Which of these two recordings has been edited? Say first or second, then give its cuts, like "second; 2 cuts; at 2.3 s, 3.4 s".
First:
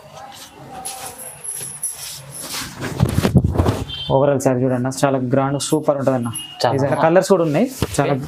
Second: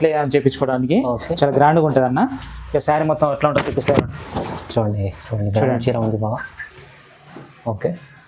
first; 1 cut; at 6.9 s